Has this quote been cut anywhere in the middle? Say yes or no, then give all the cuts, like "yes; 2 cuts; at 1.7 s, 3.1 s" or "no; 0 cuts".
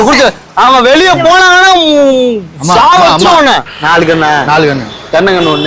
yes; 1 cut; at 3.7 s